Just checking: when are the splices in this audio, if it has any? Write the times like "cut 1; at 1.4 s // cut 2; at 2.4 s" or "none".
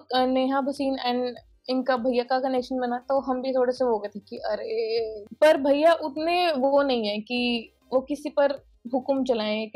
cut 1; at 5.2 s